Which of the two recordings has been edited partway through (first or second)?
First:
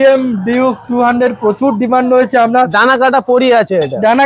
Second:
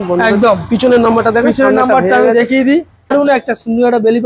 second